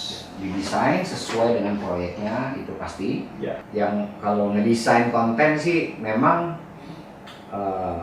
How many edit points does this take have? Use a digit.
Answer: 1